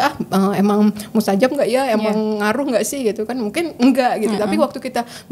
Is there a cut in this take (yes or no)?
no